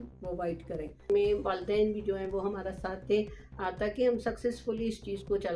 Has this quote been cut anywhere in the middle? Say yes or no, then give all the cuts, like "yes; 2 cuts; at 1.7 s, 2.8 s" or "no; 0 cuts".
yes; 1 cut; at 1.1 s